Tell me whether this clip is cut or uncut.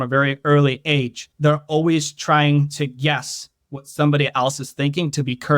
cut